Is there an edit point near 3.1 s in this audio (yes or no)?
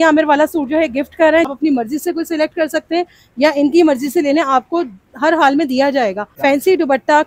no